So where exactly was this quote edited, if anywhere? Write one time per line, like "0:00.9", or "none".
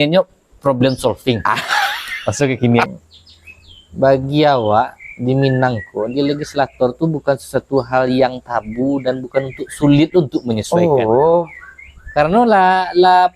0:02.9